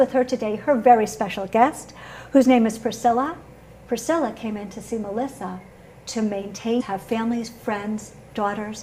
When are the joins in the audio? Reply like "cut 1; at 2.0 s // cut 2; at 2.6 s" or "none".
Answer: none